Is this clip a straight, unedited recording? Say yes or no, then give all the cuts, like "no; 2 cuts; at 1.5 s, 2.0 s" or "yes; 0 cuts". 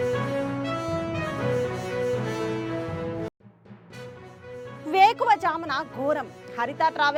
yes; 0 cuts